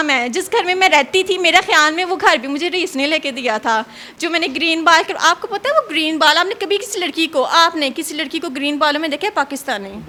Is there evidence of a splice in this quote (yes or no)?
no